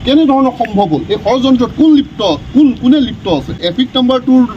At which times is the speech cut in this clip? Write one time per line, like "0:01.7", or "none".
0:03.6